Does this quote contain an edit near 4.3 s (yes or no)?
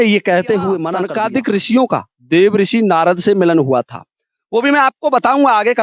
no